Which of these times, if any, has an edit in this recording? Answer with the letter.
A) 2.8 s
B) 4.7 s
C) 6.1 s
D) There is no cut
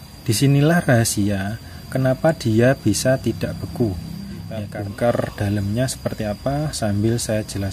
B